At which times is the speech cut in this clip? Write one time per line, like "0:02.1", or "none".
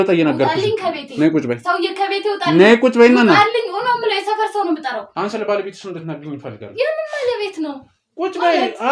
0:05.1